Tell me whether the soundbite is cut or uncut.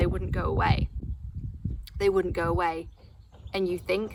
uncut